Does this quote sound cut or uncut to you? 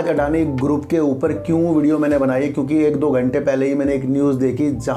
uncut